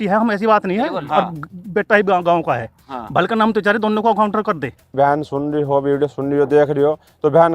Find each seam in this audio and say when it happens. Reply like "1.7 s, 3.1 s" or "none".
4.9 s